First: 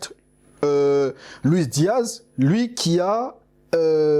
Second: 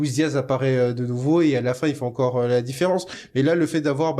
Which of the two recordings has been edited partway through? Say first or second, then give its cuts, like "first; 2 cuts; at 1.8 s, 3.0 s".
second; 1 cut; at 3.2 s